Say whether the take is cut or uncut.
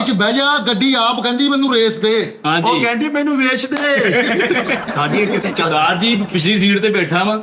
uncut